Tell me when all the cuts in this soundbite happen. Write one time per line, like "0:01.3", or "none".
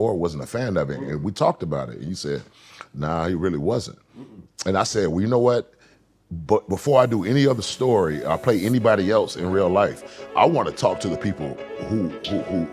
none